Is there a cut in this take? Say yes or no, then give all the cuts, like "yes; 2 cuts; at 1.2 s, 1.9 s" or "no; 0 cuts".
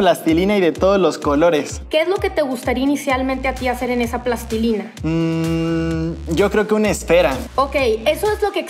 yes; 1 cut; at 1.8 s